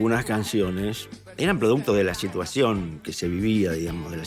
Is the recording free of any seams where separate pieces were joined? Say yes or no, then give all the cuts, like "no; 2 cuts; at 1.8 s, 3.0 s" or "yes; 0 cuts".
yes; 0 cuts